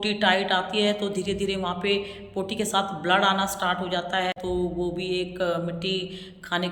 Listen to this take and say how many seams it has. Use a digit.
1